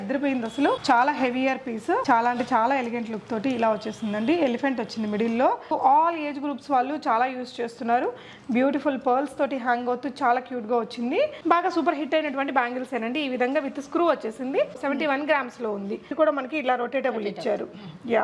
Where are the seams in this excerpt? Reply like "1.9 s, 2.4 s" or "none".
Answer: 0.8 s, 2.0 s, 5.7 s, 11.4 s, 16.1 s